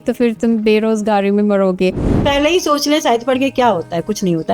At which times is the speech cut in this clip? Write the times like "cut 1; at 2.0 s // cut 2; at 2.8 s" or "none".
cut 1; at 2.1 s